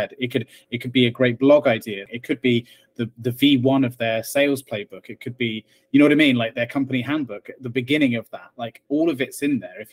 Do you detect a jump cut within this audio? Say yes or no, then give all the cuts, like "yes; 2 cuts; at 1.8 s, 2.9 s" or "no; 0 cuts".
yes; 1 cut; at 2.1 s